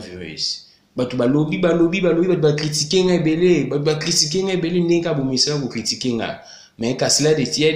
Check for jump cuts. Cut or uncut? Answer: uncut